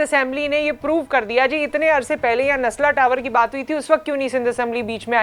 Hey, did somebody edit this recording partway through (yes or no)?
no